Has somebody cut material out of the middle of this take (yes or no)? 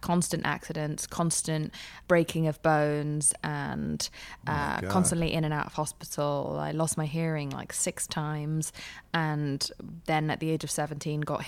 yes